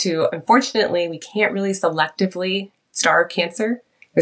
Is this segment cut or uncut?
uncut